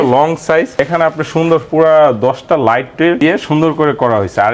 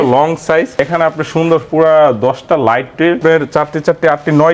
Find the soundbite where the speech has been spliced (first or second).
second